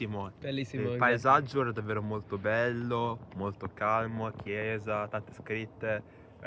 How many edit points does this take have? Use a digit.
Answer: 0